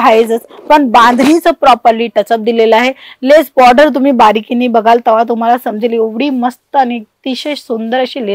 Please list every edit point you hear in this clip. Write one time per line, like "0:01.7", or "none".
none

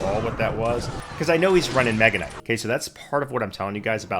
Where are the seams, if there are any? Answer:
0:01.0
0:02.3

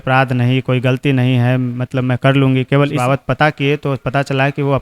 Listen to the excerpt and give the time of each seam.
0:03.0

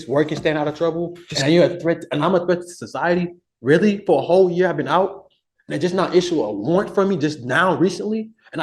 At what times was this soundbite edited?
none

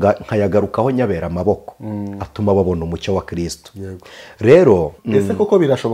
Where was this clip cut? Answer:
0:05.0

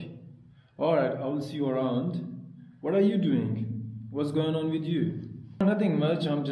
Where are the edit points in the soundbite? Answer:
0:05.6

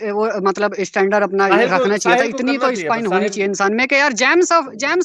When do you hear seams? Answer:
none

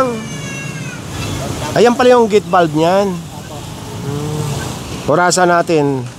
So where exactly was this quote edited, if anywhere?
0:01.0
0:04.8

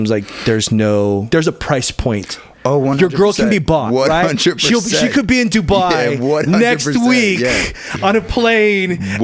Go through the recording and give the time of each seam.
0:01.3

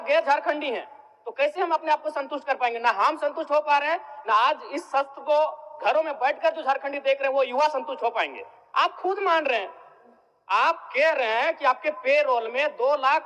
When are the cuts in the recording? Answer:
none

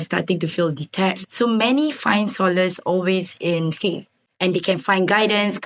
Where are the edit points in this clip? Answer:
0:01.2

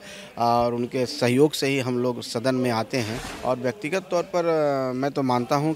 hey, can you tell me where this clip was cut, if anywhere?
0:03.2

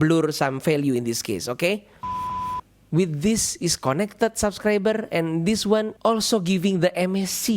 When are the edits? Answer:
0:02.4

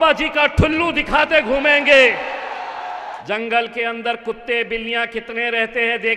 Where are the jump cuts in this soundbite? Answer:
0:03.2

